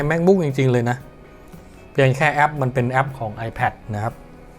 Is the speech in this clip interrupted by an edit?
no; 0 cuts

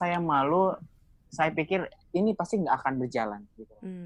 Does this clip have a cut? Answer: no; 0 cuts

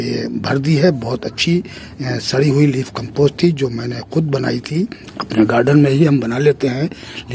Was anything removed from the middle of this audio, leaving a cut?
no; 0 cuts

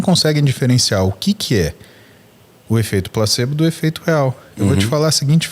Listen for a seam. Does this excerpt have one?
no; 0 cuts

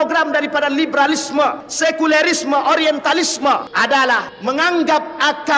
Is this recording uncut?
no; 3 cuts; at 1.7 s, 3.7 s, 4.3 s

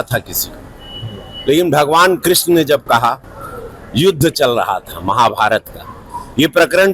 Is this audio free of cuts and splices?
yes; 0 cuts

